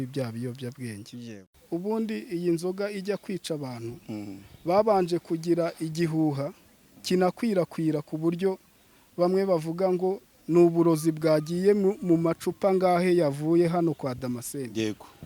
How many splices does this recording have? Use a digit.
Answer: 1